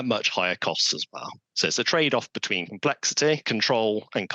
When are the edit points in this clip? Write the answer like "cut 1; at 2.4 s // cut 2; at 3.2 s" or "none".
cut 1; at 3.4 s